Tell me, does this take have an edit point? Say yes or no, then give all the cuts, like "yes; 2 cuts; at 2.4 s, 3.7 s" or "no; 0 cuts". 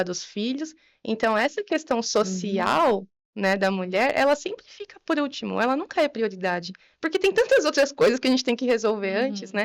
no; 0 cuts